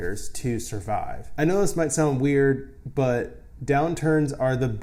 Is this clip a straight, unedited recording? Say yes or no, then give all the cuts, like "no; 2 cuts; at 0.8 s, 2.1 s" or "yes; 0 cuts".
yes; 0 cuts